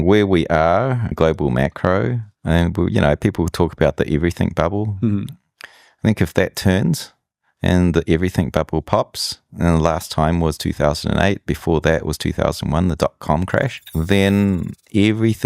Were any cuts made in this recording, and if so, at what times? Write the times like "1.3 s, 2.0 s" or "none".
1.1 s, 2.3 s, 13.8 s